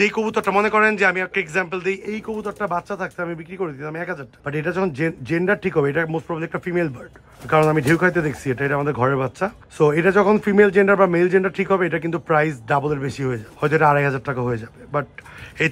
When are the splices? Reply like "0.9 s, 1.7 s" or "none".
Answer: none